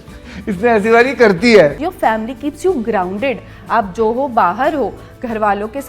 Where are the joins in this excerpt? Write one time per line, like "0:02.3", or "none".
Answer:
0:01.8

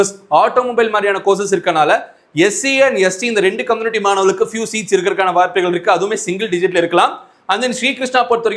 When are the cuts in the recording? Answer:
none

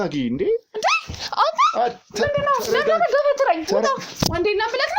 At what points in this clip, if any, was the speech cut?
none

